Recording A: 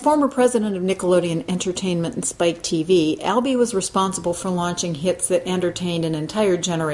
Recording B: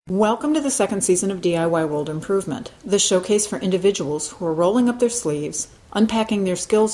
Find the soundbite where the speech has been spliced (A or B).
A